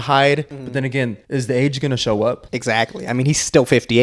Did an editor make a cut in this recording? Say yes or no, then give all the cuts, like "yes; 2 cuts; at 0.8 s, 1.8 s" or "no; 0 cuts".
yes; 2 cuts; at 0.8 s, 2.5 s